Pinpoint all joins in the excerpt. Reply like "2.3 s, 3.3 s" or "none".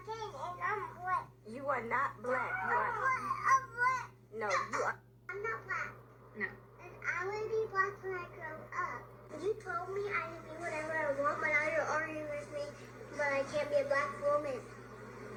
none